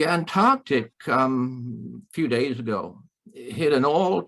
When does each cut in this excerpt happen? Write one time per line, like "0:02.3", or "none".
none